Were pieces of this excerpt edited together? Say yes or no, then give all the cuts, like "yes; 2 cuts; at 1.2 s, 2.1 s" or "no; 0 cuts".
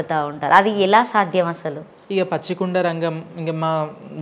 yes; 1 cut; at 1.9 s